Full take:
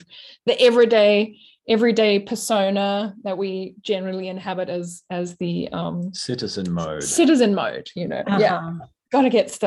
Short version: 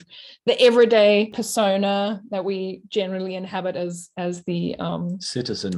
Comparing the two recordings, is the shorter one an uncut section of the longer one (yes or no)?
no